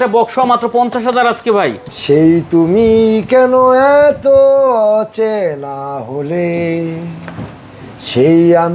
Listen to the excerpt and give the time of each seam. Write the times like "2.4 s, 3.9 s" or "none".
1.8 s